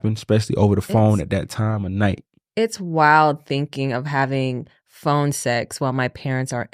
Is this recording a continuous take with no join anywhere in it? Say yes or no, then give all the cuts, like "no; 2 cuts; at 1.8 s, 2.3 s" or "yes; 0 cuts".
yes; 0 cuts